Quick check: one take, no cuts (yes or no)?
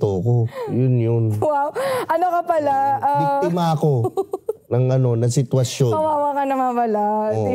yes